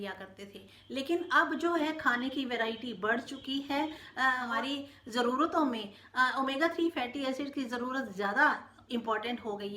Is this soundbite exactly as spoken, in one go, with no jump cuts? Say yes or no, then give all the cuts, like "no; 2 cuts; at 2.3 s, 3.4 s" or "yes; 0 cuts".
no; 1 cut; at 4.4 s